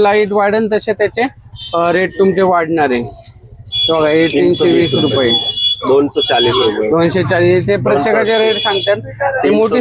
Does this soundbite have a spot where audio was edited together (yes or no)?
no